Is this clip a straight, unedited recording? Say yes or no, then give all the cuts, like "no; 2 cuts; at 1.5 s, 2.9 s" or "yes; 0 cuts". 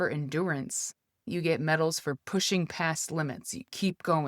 no; 1 cut; at 1.1 s